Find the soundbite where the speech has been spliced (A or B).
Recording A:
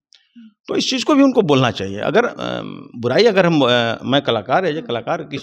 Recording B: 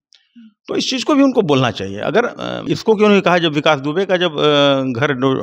B